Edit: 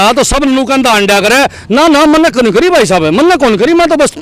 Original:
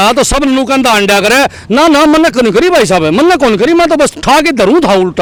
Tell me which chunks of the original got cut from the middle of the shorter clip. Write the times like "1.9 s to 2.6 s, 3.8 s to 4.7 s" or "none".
none